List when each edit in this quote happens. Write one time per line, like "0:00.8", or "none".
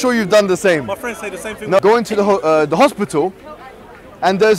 0:01.8